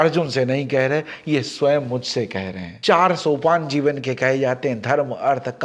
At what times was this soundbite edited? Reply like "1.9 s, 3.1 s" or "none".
2.7 s